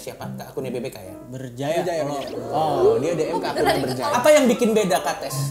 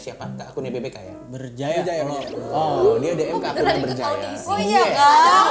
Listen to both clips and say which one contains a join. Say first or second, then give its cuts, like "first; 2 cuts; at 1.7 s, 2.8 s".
first; 1 cut; at 4.1 s